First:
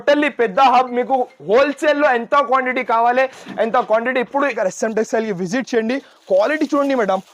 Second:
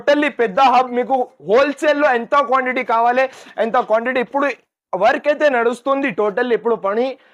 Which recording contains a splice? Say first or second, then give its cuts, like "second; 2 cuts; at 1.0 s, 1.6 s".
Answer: first; 1 cut; at 4.6 s